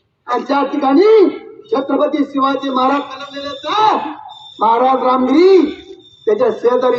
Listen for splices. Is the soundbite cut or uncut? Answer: uncut